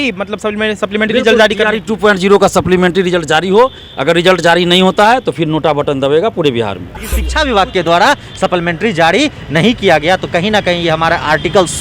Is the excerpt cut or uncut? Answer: cut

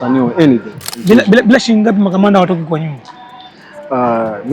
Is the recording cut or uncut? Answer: cut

